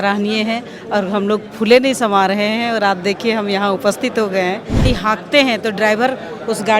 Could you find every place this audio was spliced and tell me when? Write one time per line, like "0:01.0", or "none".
0:04.8